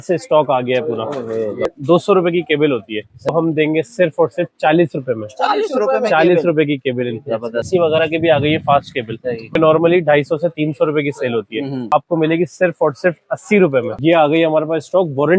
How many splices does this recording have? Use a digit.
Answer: 6